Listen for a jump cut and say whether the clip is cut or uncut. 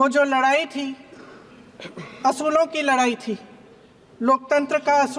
uncut